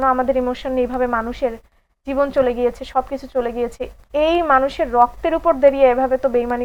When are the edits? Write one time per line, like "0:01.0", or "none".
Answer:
none